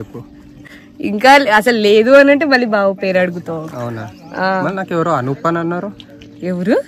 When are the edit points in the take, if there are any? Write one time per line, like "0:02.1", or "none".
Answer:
none